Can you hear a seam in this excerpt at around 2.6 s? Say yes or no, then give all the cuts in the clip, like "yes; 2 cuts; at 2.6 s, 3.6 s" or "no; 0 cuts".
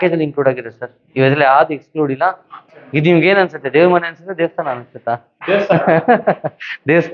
yes; 1 cut; at 2.6 s